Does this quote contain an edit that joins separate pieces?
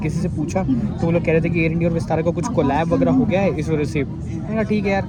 no; 0 cuts

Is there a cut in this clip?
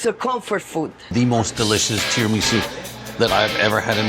yes; 1 cut; at 1.0 s

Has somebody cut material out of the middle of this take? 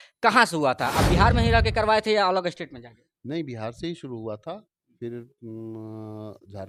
no; 0 cuts

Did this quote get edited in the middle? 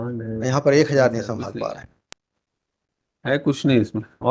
no; 0 cuts

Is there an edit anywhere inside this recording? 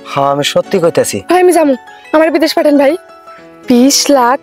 no; 0 cuts

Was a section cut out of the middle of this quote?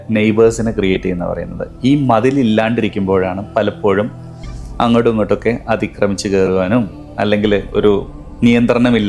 no; 0 cuts

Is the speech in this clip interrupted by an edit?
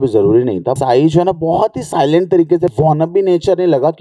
yes; 2 cuts; at 0.8 s, 2.7 s

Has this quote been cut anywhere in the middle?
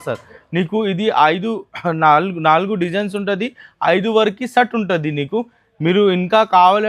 no; 0 cuts

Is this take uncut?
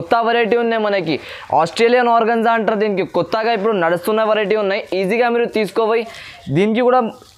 yes; 0 cuts

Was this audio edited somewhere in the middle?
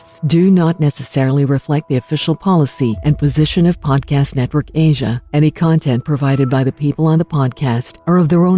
no; 0 cuts

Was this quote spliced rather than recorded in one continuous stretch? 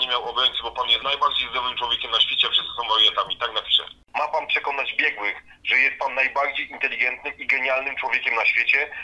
yes; 2 cuts; at 1.0 s, 3.9 s

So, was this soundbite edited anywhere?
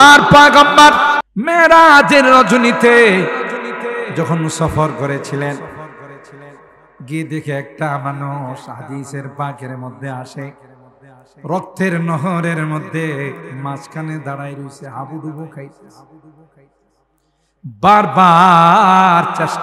yes; 1 cut; at 1.2 s

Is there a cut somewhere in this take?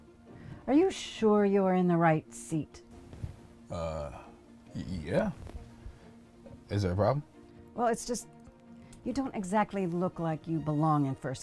no; 0 cuts

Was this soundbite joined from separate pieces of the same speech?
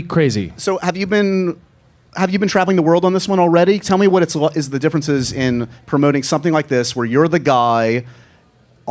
no; 0 cuts

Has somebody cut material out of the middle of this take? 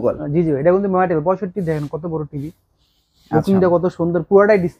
no; 0 cuts

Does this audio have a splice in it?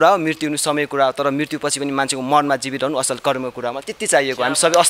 no; 0 cuts

